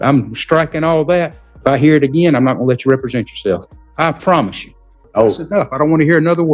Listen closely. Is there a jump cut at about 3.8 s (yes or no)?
yes